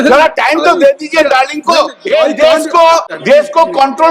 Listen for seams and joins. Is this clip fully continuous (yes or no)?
no